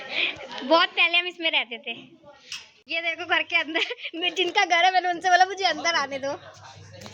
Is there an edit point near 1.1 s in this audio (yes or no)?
no